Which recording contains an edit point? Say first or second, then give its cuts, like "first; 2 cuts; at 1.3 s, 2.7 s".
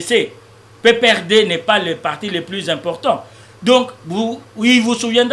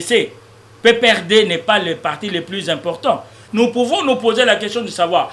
second; 1 cut; at 3.4 s